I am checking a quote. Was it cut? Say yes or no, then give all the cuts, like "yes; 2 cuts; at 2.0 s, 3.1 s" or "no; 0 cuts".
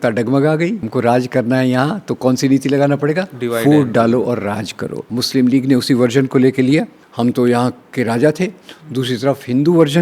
yes; 3 cuts; at 0.9 s, 5.1 s, 7.0 s